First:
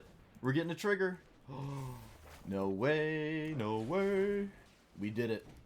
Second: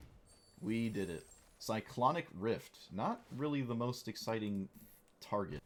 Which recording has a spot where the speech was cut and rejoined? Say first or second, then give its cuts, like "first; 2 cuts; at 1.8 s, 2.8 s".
first; 1 cut; at 4.6 s